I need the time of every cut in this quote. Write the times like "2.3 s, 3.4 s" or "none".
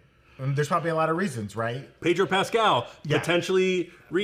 1.9 s